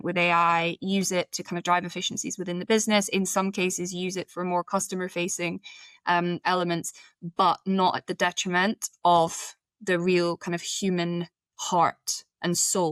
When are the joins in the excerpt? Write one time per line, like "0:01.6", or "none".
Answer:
none